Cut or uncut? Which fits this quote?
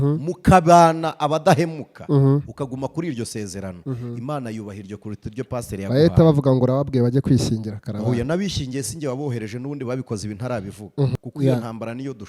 cut